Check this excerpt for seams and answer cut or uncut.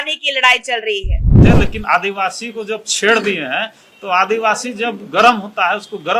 cut